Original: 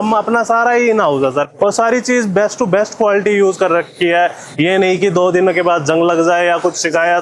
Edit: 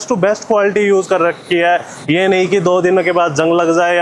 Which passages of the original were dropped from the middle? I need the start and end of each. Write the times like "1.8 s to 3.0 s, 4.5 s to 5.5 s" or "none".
none